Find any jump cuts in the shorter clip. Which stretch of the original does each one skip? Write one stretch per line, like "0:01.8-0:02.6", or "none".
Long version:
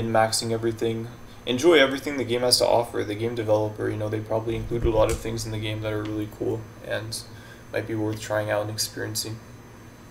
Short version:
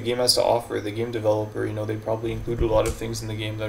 none